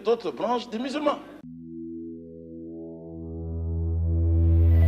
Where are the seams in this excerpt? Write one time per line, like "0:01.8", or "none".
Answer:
0:01.5